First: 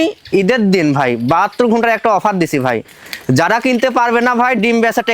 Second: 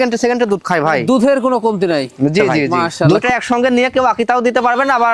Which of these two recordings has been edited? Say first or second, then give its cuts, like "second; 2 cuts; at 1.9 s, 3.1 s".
second; 1 cut; at 3.0 s